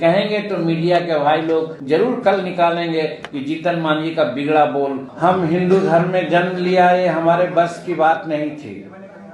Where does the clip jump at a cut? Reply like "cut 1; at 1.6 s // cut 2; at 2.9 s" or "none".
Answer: cut 1; at 1.7 s // cut 2; at 5.1 s

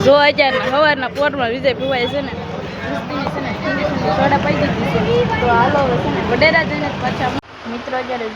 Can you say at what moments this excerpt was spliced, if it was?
cut 1; at 7.4 s

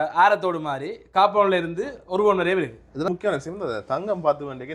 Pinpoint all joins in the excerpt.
cut 1; at 3.1 s

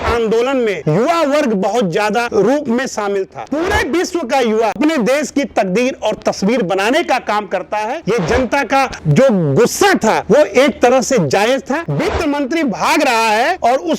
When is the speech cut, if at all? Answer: cut 1; at 3.4 s // cut 2; at 4.8 s // cut 3; at 8.0 s // cut 4; at 11.9 s

